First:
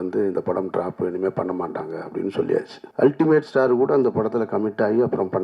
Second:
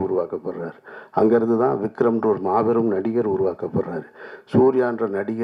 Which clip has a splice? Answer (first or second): first